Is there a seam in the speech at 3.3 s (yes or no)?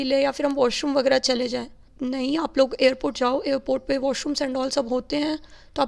no